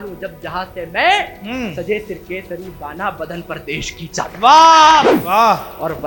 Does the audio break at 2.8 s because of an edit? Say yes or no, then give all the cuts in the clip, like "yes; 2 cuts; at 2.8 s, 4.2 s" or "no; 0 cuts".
no; 1 cut; at 5.1 s